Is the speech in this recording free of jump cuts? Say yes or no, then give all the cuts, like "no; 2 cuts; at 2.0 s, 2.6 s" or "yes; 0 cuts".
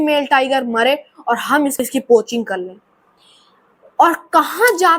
no; 1 cut; at 1.8 s